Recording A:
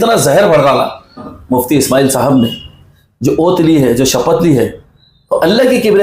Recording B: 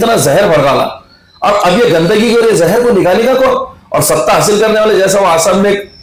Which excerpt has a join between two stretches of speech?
A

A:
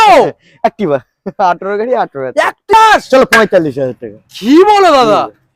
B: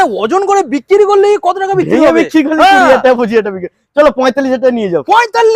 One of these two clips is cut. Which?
A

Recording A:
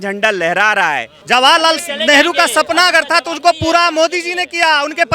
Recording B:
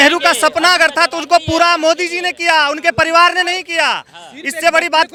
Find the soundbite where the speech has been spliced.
A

